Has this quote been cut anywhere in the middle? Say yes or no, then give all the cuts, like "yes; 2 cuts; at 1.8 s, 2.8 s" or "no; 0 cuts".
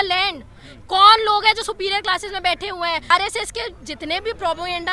yes; 1 cut; at 3.1 s